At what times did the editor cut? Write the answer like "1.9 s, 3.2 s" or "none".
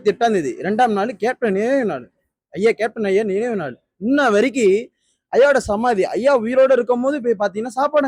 none